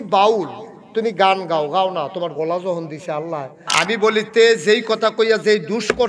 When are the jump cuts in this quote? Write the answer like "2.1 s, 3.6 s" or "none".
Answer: 3.6 s